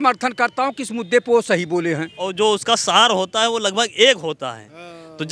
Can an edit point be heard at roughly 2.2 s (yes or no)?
yes